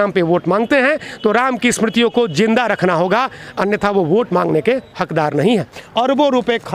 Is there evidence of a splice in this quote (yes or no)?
yes